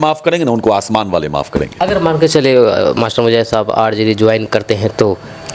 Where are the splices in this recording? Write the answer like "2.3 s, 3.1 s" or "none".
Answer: 1.7 s

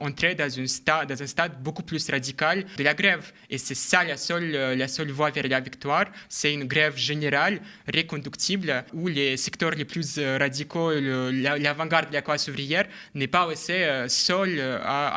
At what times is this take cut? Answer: none

